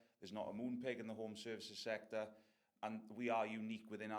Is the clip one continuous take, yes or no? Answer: no